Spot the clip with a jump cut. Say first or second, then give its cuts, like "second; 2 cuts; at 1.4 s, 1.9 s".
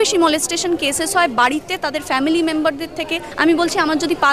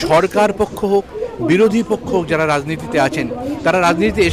first; 1 cut; at 3.2 s